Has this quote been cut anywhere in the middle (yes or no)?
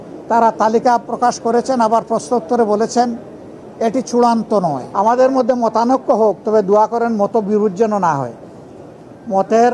yes